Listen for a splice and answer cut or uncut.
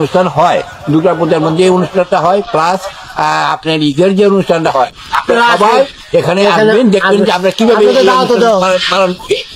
uncut